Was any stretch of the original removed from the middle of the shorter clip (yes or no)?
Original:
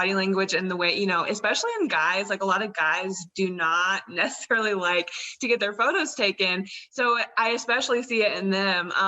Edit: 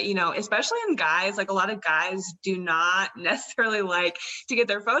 no